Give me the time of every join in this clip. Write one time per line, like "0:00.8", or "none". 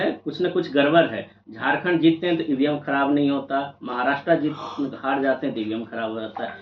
none